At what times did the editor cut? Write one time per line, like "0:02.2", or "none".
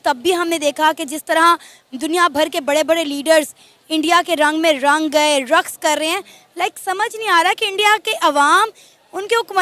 none